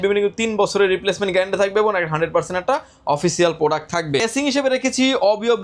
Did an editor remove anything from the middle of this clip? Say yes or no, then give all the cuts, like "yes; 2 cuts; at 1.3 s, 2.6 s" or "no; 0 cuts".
no; 0 cuts